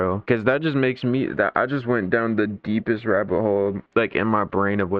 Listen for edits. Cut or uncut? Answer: cut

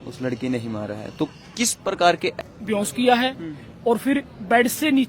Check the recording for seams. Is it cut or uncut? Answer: cut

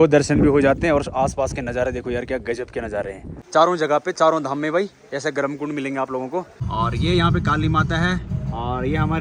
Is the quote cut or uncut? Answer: cut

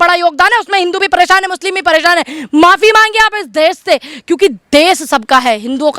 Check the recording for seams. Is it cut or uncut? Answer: uncut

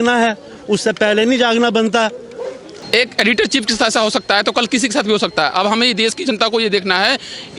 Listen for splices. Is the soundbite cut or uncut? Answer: cut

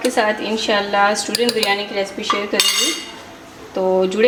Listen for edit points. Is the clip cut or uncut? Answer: uncut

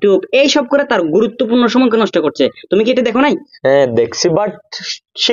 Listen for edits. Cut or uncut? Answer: uncut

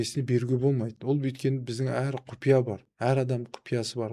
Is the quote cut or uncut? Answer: uncut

